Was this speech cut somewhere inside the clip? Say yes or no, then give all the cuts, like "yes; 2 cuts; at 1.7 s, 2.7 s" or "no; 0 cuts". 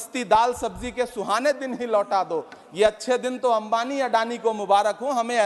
no; 0 cuts